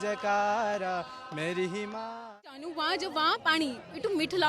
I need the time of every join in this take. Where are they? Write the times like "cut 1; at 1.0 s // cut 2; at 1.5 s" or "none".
cut 1; at 2.5 s